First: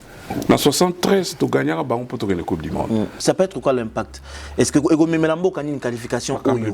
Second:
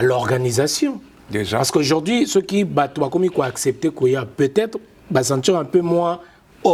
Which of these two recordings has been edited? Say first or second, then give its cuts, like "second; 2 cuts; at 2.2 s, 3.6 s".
first; 1 cut; at 3.2 s